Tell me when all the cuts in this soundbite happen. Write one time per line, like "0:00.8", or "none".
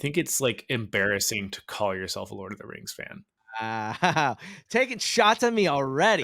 0:03.4